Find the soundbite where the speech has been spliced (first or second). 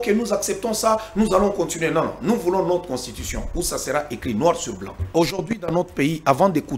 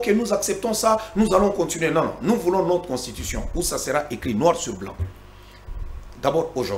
first